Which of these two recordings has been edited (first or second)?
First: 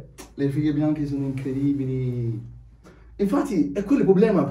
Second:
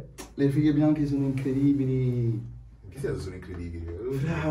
first